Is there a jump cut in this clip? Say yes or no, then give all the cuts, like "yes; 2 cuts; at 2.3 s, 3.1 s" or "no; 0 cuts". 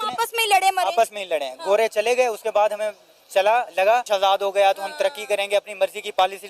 yes; 1 cut; at 4.1 s